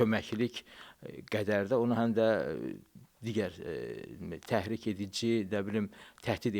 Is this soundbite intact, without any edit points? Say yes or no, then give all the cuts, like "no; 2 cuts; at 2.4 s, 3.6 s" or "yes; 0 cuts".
yes; 0 cuts